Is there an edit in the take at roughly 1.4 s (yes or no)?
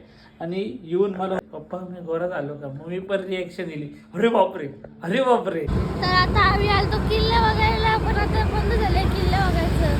yes